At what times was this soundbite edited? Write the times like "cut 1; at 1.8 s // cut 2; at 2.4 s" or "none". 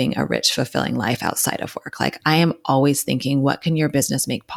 none

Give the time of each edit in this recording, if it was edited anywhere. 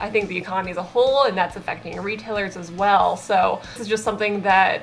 cut 1; at 3.8 s

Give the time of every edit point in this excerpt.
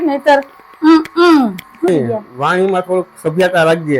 cut 1; at 1.9 s

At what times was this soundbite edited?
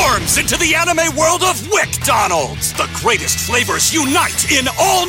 none

